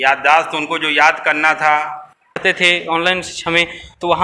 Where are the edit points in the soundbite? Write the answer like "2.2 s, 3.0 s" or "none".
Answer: 2.4 s

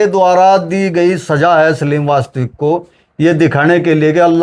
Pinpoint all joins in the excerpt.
none

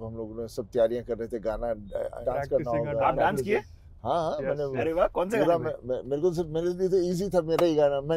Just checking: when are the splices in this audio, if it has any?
2.2 s

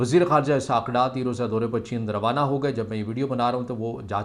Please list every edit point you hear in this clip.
none

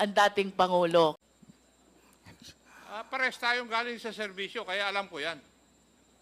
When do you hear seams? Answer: 1.2 s

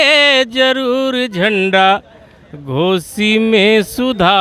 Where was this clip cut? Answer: none

